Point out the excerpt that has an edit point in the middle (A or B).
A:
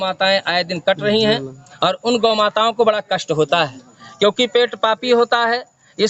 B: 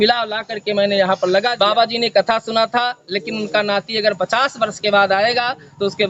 B